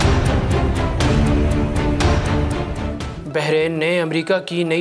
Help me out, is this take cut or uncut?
cut